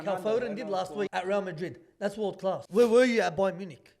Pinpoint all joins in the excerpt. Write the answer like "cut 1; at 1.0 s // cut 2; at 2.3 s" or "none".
cut 1; at 1.1 s // cut 2; at 2.6 s